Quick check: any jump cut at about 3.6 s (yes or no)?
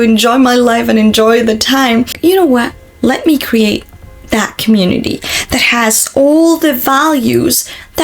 no